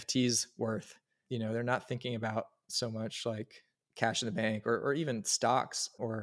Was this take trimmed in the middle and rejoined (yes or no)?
no